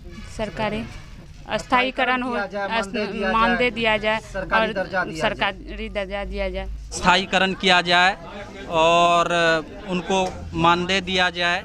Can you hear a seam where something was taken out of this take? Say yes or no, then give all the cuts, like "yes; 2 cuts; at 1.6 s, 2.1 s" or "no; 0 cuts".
yes; 1 cut; at 7.0 s